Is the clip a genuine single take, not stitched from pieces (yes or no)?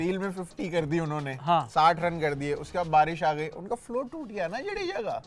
yes